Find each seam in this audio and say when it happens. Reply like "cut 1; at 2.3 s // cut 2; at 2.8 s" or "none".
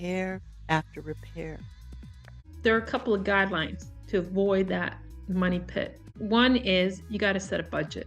cut 1; at 2.4 s // cut 2; at 6.1 s